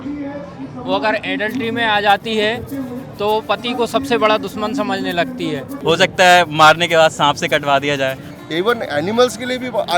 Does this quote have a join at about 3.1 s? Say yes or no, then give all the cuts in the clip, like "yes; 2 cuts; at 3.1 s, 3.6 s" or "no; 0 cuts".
no; 2 cuts; at 5.7 s, 8.3 s